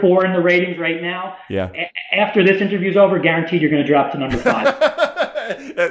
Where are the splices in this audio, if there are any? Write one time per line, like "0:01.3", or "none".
0:04.5